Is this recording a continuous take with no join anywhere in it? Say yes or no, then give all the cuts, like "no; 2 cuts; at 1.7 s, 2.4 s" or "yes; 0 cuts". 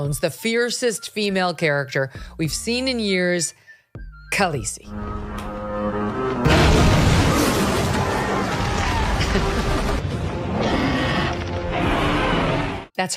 yes; 0 cuts